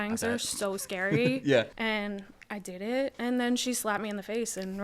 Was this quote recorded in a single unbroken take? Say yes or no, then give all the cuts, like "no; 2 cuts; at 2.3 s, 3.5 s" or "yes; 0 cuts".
no; 1 cut; at 1.7 s